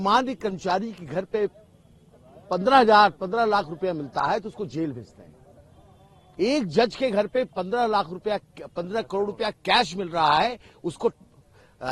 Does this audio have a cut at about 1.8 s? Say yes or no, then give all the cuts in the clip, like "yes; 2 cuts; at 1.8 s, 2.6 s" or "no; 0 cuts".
no; 0 cuts